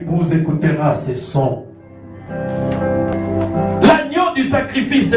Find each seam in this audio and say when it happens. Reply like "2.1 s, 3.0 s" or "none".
3.1 s